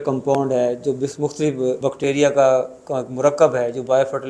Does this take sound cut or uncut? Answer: cut